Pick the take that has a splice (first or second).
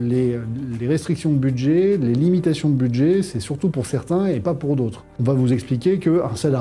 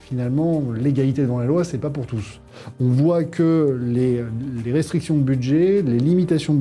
first